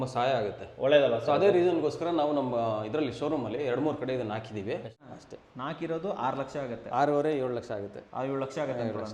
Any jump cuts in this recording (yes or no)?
yes